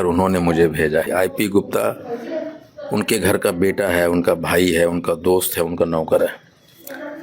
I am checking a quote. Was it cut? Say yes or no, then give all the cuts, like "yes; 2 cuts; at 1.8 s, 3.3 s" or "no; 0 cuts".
yes; 1 cut; at 1.1 s